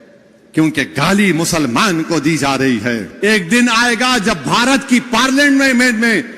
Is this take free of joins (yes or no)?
no